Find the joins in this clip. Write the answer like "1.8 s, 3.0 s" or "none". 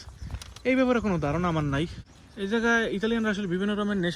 2.1 s

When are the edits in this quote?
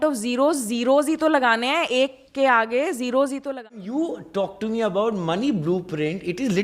3.5 s

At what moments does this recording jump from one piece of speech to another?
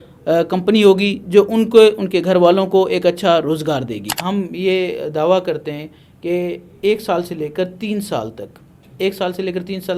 4.2 s

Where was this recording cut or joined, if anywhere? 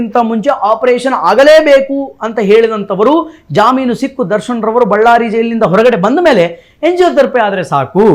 none

